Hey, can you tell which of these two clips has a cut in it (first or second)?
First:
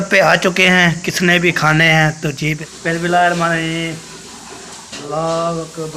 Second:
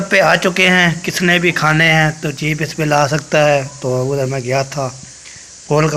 first